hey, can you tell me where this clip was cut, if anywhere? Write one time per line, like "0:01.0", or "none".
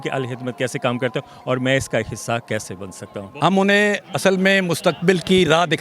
0:03.2